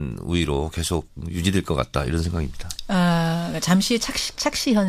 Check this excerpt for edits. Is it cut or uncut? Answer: uncut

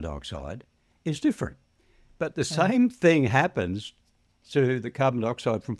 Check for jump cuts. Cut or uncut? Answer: uncut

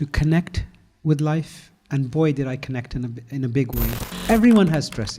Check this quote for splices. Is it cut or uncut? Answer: cut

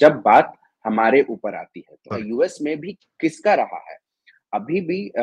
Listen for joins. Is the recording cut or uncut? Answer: cut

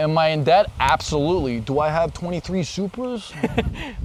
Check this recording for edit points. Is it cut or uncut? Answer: uncut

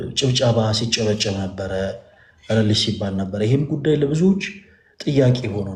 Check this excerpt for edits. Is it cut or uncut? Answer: uncut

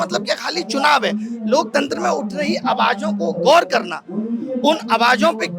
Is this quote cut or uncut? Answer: uncut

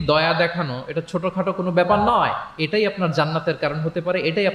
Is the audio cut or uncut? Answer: uncut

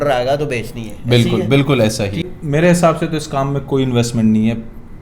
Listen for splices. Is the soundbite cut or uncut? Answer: cut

